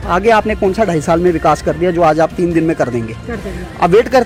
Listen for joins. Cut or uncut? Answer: uncut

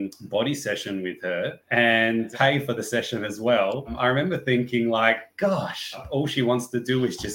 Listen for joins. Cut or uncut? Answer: cut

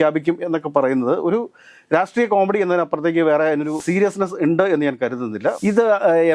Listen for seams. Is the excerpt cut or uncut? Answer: cut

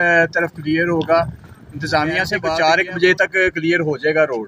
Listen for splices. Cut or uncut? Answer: cut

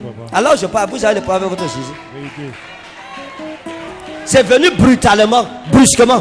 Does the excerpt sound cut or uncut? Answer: uncut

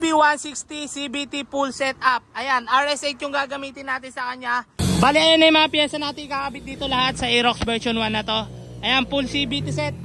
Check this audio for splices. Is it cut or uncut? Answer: cut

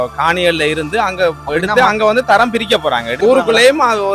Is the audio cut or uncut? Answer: cut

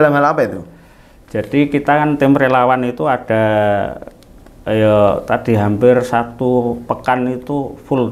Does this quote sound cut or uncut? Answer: uncut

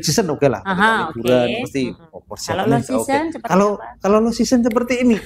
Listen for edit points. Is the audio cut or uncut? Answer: uncut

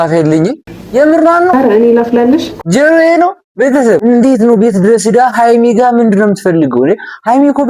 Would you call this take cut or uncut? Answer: cut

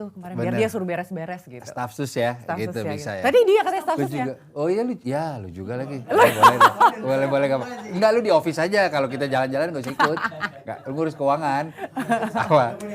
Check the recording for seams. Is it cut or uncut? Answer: uncut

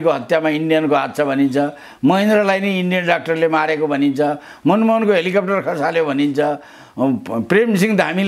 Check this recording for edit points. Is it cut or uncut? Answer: uncut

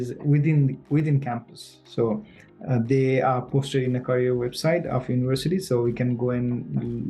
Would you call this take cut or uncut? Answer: uncut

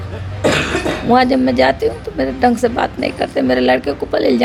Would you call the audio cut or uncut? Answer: uncut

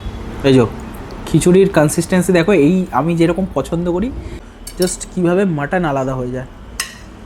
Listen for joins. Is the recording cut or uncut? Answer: cut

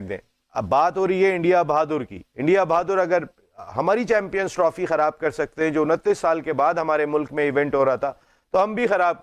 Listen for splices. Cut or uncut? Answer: uncut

